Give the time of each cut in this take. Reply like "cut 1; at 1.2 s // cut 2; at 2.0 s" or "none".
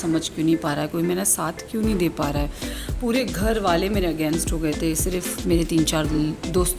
none